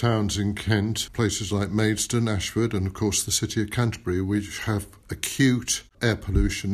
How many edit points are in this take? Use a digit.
2